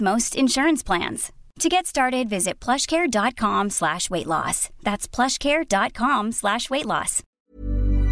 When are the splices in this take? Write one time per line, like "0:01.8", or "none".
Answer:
0:07.2